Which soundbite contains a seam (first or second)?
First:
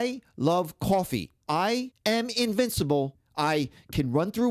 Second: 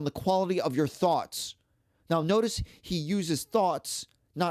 first